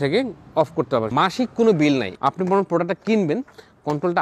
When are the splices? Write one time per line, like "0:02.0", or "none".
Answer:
0:01.1
0:02.1